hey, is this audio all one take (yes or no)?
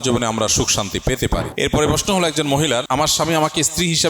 no